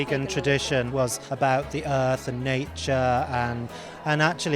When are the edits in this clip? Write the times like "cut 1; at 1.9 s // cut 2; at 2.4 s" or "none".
cut 1; at 1.0 s